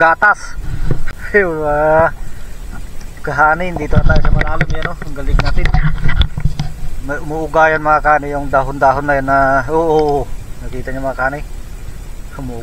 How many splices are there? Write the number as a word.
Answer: one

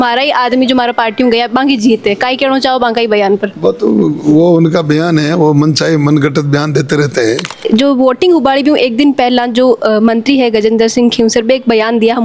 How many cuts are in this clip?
one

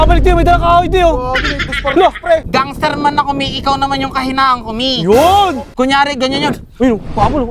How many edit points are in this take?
two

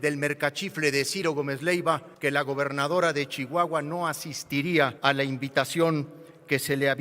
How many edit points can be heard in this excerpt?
two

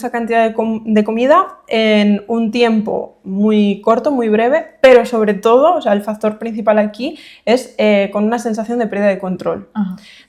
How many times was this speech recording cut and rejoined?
zero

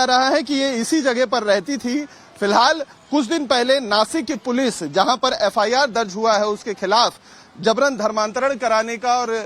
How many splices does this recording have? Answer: zero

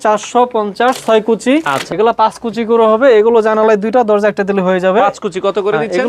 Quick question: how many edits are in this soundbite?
one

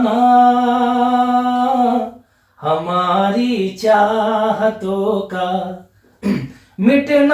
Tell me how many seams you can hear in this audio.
zero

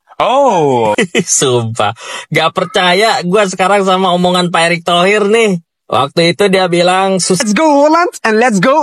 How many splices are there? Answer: two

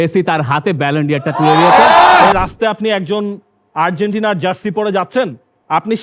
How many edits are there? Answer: one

